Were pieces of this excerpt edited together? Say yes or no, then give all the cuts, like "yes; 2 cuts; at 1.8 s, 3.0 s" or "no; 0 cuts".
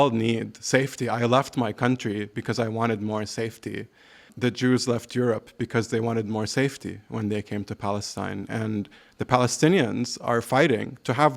yes; 1 cut; at 4.3 s